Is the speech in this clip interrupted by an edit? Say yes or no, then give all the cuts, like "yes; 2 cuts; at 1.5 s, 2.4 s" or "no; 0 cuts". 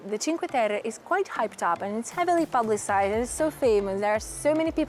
no; 0 cuts